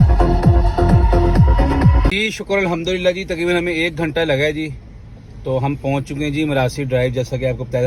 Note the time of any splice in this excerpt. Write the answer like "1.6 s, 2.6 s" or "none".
none